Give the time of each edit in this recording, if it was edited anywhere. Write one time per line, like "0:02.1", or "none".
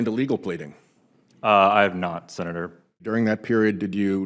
0:03.0